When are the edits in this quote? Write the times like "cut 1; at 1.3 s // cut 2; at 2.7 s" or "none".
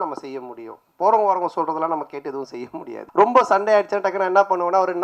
cut 1; at 3.0 s